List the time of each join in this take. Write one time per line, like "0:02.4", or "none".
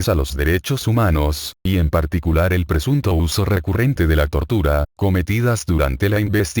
none